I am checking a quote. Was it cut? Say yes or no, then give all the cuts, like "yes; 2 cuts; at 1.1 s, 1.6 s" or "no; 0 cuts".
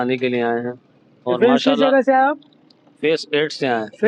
no; 0 cuts